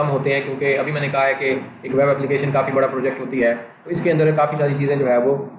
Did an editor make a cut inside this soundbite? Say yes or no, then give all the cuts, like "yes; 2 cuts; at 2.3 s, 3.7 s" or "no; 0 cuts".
no; 0 cuts